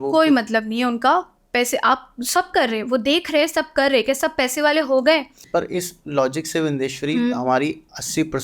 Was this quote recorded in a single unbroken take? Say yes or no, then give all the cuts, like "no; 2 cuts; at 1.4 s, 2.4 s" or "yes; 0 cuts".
no; 1 cut; at 5.4 s